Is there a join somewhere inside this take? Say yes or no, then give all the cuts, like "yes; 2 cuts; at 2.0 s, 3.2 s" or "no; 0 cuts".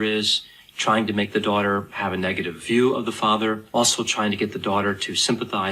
yes; 1 cut; at 3.6 s